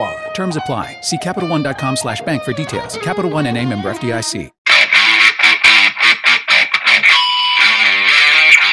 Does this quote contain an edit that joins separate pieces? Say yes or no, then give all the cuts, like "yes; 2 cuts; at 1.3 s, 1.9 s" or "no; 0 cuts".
yes; 1 cut; at 4.6 s